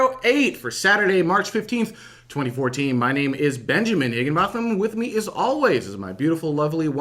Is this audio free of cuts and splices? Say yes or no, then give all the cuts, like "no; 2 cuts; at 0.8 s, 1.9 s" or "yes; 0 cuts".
no; 1 cut; at 4.3 s